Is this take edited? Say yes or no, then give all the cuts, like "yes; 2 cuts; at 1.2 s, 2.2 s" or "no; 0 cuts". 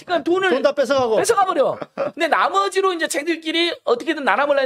no; 0 cuts